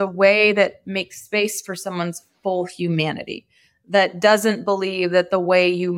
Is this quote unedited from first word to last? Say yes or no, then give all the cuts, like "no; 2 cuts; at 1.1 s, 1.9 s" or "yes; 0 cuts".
yes; 0 cuts